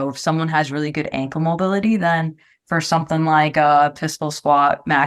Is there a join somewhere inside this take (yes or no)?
no